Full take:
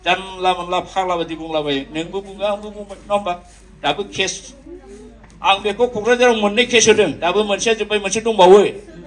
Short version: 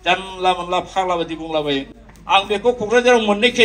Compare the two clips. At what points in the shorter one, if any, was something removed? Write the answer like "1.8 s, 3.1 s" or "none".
1.9 s